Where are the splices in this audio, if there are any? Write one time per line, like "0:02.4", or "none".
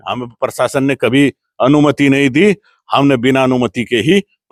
none